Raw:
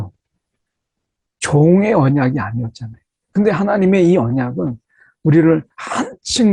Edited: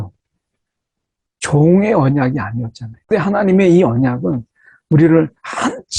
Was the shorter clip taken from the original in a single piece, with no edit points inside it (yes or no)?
no